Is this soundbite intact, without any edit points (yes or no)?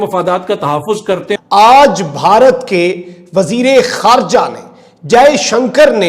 no